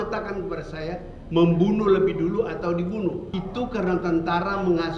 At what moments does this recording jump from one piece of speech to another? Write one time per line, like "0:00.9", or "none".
0:03.3

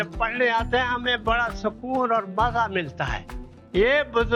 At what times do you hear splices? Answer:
none

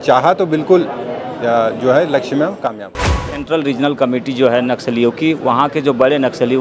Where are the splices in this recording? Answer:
0:03.4

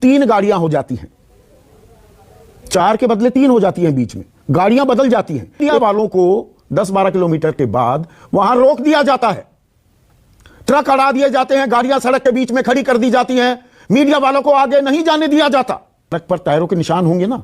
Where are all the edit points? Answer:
0:05.6
0:16.2

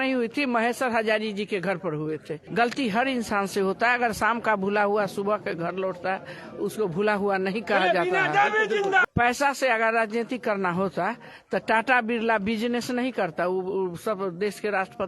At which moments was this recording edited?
0:02.4
0:09.0

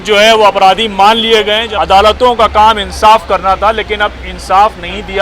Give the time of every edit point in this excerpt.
0:01.7

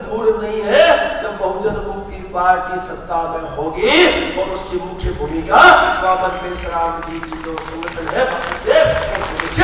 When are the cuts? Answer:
none

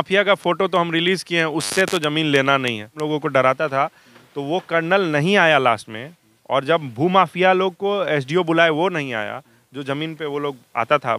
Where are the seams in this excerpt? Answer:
0:03.0

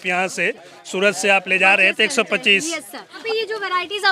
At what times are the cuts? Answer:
0:03.2

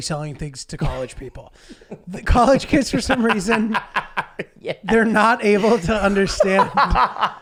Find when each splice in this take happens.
none

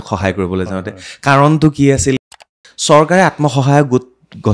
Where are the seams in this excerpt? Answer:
0:02.2

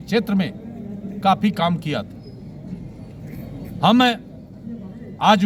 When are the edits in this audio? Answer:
none

